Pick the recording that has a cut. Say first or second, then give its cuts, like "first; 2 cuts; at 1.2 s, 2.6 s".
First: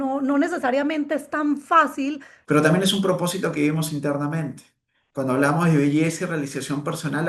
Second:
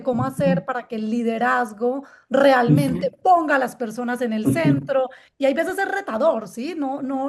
first; 1 cut; at 2.3 s